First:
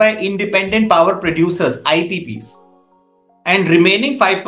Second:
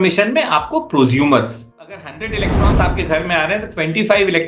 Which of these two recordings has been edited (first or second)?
second